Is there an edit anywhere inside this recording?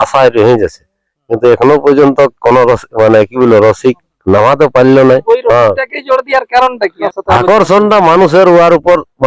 yes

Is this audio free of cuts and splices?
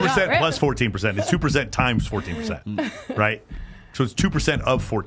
yes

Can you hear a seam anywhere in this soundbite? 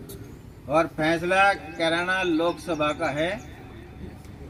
no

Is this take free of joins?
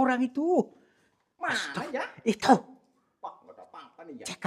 yes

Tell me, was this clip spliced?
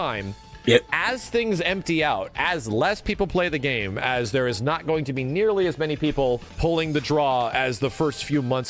no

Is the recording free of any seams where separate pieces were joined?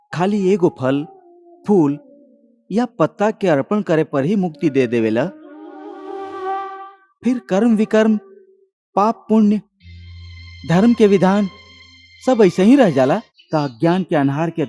no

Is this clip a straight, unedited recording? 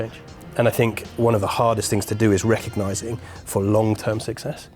yes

